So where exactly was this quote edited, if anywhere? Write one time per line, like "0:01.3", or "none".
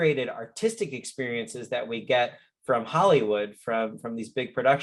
none